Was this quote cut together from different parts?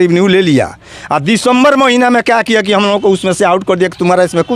no; 0 cuts

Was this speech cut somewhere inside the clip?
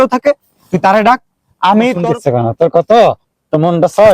yes; 1 cut; at 2.0 s

